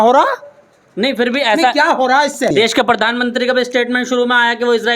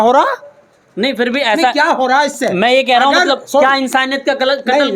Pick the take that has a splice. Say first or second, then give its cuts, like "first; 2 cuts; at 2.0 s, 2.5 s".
first; 1 cut; at 2.5 s